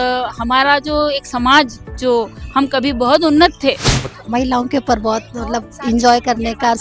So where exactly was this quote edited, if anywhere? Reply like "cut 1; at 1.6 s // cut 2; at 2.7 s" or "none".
cut 1; at 4.1 s